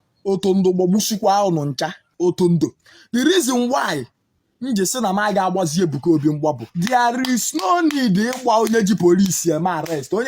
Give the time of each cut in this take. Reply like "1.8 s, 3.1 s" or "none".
2.0 s, 6.7 s

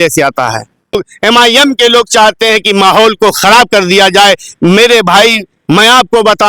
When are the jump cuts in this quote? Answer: 1.0 s

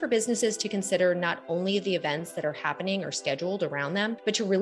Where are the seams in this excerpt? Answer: none

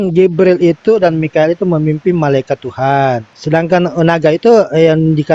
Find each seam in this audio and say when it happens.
3.3 s

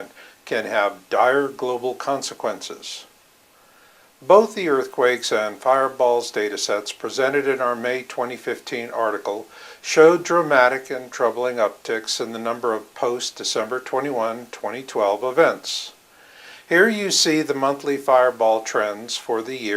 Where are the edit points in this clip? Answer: 18.4 s

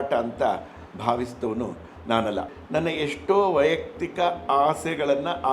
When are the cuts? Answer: 2.5 s

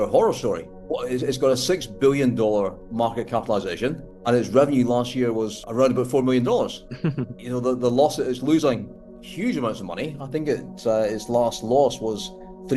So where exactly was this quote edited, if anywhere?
none

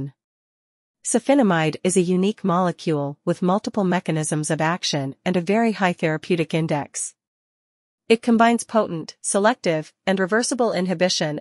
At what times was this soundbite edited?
none

